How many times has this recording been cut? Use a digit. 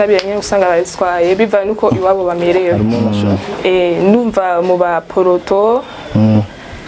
1